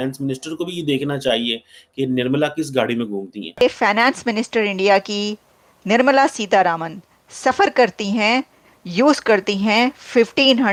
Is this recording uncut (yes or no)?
yes